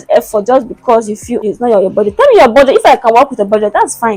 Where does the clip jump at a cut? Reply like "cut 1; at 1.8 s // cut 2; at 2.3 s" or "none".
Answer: cut 1; at 1.4 s